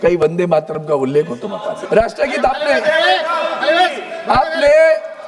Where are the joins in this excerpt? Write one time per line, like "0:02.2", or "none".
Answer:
0:01.7